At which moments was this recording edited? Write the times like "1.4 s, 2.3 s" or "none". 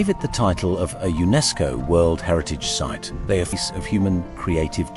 3.5 s

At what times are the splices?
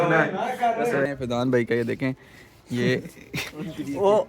1.1 s

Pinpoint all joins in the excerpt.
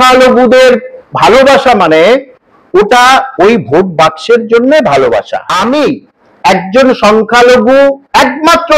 5.5 s

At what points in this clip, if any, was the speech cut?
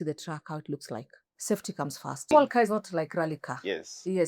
1.3 s, 2.3 s

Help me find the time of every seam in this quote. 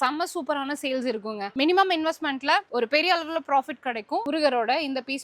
1.5 s, 4.2 s

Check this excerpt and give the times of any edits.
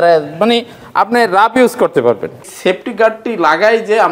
2.4 s

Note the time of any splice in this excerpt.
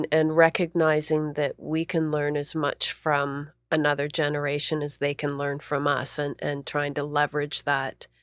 none

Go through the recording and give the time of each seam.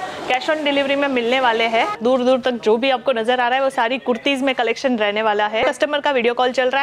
2.0 s, 5.6 s

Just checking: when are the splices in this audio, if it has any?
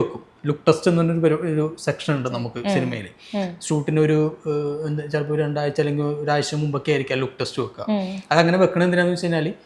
none

